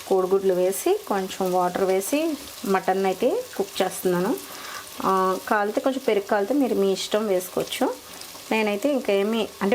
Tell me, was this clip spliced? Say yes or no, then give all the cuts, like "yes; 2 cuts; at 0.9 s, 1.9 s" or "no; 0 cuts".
no; 0 cuts